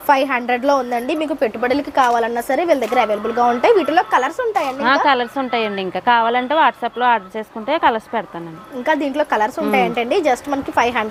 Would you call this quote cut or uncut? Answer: uncut